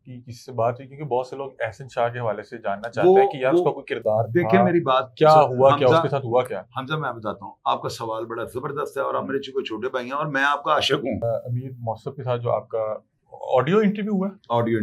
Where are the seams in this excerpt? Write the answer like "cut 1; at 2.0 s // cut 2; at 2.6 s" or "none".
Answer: cut 1; at 11.3 s